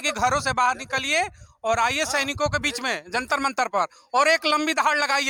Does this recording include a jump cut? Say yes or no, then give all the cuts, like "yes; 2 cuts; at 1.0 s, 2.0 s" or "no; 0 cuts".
no; 0 cuts